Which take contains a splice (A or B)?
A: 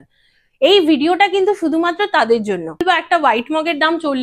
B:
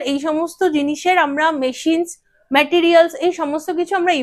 A